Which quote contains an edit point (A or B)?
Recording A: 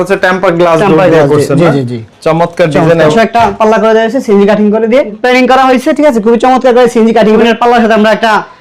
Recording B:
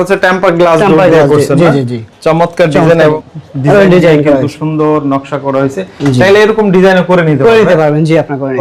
A